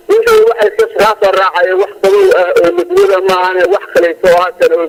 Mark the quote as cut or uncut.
uncut